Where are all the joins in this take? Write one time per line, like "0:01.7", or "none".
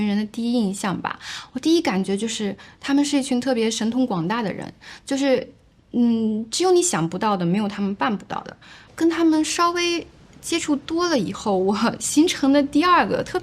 0:08.8